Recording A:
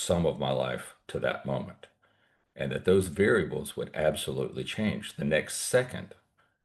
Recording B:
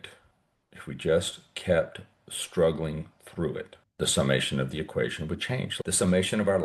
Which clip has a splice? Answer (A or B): B